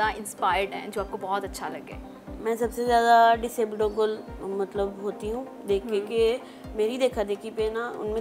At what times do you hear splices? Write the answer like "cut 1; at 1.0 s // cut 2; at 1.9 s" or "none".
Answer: none